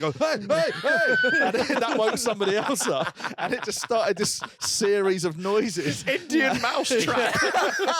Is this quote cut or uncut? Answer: uncut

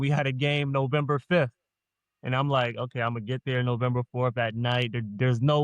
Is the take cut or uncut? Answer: uncut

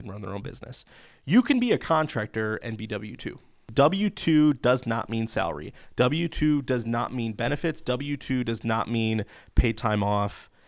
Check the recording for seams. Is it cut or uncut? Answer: cut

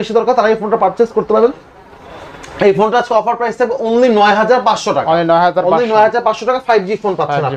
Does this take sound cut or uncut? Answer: uncut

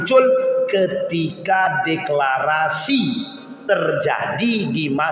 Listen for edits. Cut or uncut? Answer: uncut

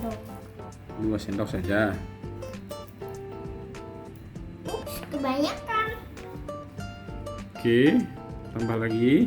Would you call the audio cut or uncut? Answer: cut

